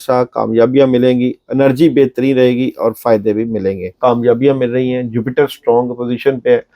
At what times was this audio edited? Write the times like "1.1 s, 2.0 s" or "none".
3.9 s